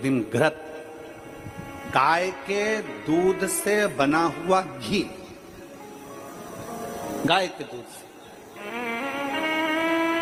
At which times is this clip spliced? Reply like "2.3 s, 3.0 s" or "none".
none